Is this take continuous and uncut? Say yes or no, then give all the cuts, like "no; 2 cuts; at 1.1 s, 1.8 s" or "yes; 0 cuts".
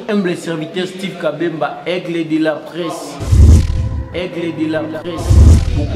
yes; 0 cuts